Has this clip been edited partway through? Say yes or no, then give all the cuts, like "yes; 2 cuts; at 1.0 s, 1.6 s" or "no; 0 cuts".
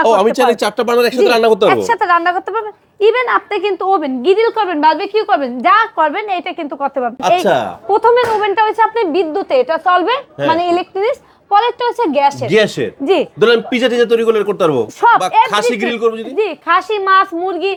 no; 0 cuts